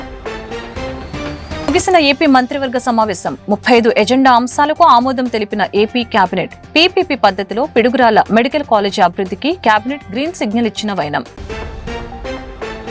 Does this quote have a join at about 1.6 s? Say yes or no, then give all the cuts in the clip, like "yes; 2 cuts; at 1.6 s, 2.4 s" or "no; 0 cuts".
yes; 1 cut; at 1.6 s